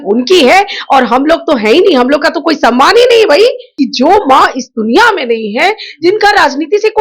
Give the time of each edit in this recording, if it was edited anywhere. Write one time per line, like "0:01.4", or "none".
0:03.6